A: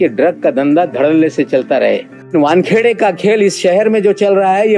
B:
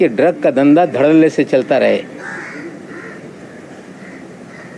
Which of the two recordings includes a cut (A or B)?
A